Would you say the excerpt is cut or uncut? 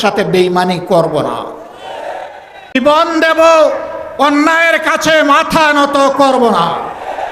cut